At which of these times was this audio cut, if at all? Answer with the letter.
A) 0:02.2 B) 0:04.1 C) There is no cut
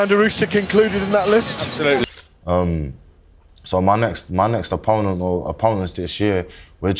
A